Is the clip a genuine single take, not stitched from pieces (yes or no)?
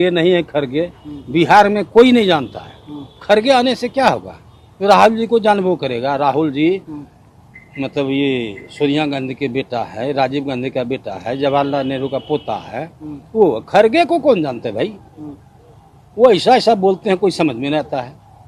yes